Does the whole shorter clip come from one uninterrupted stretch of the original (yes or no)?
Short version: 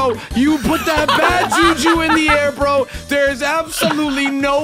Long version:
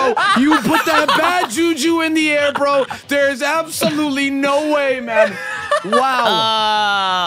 yes